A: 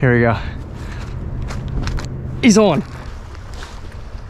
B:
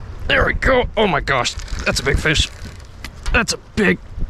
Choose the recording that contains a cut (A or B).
A